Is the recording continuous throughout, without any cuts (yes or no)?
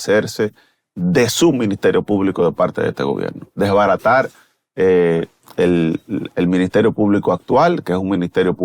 yes